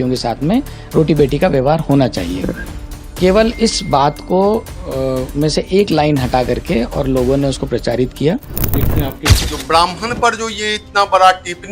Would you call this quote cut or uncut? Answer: cut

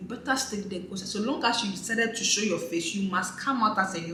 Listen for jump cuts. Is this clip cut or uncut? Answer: uncut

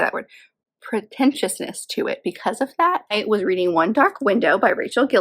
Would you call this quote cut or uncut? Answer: cut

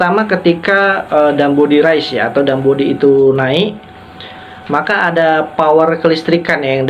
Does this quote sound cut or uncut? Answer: uncut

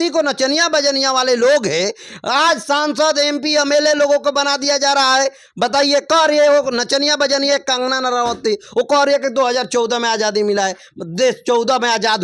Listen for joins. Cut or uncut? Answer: uncut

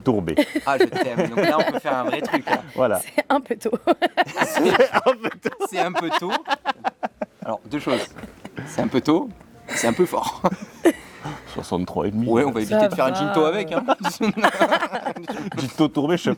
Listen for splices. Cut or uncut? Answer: uncut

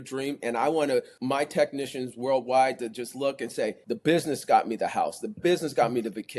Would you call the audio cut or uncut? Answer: cut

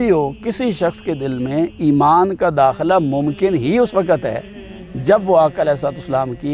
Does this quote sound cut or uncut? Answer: uncut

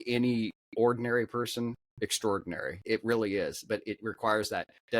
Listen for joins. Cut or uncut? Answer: cut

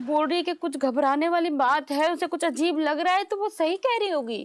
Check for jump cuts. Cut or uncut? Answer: uncut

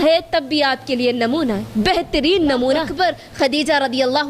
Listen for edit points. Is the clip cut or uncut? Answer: cut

